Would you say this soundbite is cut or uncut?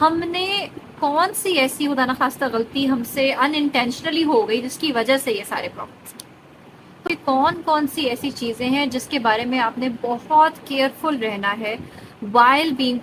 cut